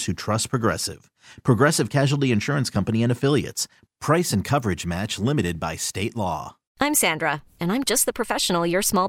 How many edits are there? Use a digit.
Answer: 1